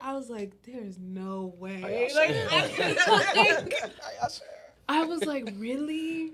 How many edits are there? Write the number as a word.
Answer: zero